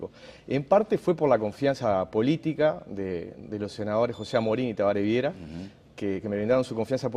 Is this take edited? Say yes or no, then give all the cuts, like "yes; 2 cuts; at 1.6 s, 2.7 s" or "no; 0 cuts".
no; 0 cuts